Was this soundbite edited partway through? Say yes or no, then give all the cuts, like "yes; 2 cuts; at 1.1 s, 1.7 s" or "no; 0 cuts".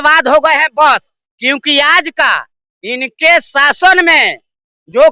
no; 0 cuts